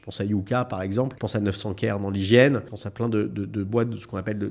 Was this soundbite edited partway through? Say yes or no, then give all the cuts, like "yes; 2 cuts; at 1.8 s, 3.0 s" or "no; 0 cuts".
yes; 2 cuts; at 1.2 s, 2.8 s